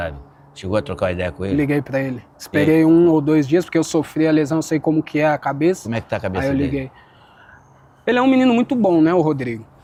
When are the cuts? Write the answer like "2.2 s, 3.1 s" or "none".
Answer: none